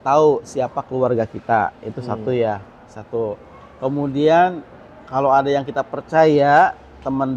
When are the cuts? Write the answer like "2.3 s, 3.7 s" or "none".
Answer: none